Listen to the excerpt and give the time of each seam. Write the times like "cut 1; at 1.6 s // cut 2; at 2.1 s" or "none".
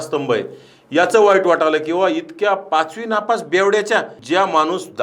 cut 1; at 4.1 s